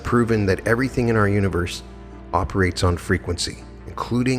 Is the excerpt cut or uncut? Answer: uncut